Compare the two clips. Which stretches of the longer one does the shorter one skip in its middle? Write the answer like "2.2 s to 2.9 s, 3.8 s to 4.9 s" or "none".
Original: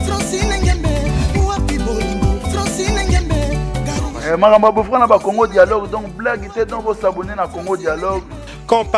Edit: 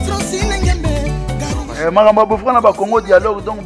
1.0 s to 3.4 s